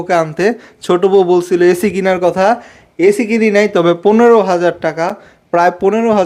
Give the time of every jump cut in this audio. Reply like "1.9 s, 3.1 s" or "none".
none